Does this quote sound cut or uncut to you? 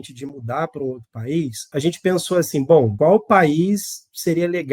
cut